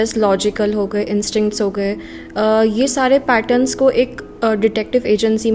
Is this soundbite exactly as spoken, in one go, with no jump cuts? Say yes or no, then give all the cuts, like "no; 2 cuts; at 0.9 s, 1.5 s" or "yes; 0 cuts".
yes; 0 cuts